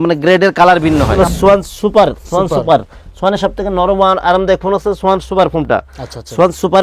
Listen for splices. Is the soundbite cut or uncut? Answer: cut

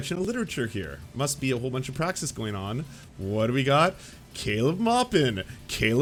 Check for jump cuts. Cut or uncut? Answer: uncut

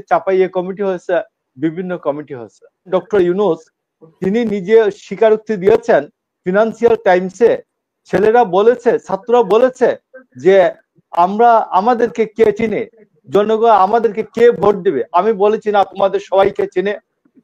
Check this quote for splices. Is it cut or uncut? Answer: cut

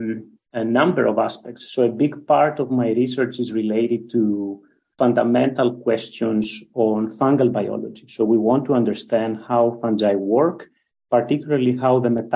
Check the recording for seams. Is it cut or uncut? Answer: uncut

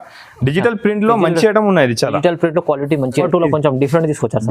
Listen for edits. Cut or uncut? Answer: cut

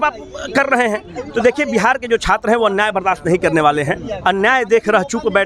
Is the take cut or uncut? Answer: cut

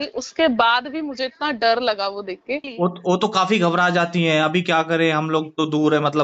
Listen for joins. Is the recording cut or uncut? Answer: cut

